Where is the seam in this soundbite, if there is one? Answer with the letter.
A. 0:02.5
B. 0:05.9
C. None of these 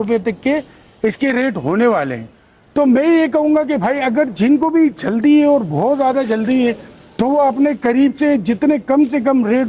C